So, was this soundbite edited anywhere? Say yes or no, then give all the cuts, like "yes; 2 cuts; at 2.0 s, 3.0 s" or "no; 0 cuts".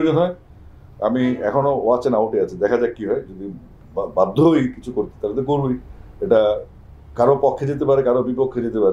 no; 0 cuts